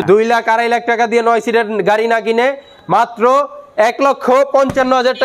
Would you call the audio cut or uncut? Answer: uncut